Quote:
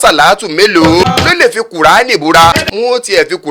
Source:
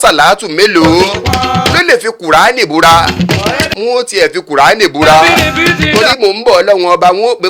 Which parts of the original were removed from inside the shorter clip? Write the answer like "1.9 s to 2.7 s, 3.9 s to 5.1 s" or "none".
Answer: 1.1 s to 1.6 s, 3.0 s to 3.6 s

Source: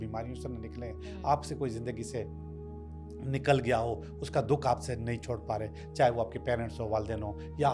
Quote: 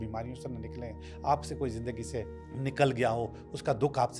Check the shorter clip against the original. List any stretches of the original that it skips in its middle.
2.4 s to 3.1 s

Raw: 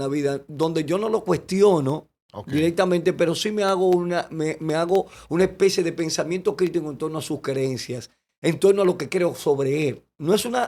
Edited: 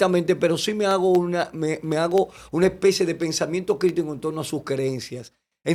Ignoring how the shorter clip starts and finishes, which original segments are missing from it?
none

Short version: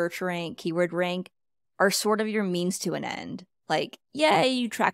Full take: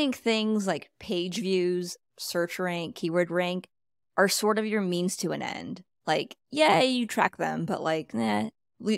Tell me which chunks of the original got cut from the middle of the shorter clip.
none

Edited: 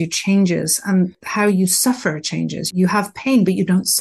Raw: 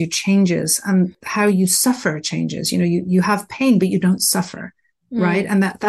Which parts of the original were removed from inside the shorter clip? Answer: 2.7 s to 3.0 s

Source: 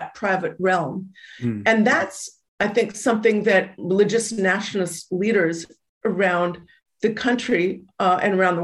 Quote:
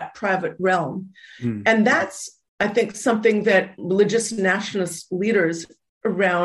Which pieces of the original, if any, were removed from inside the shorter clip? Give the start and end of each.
none

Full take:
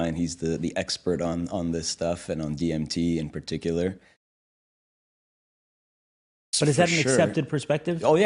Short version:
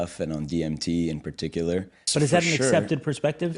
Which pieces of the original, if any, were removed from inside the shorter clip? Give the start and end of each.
4.1 s to 6.4 s

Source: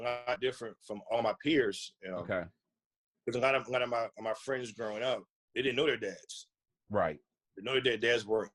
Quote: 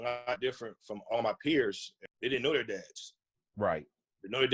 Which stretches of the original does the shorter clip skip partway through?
2.0 s to 5.3 s

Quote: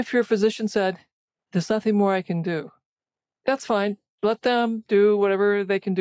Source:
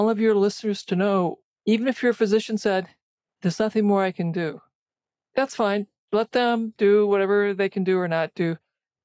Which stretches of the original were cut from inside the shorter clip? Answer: none

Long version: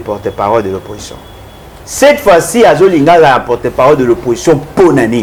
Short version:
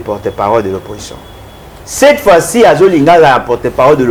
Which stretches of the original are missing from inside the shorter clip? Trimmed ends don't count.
none

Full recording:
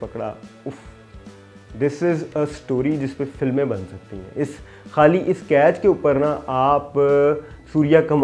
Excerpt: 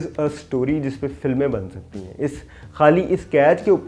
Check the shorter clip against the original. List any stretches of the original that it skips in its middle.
none

